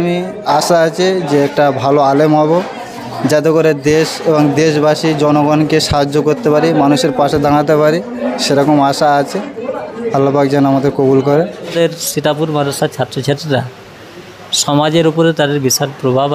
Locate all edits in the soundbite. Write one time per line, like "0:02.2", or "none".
0:11.7